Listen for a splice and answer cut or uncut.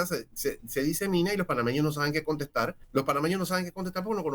cut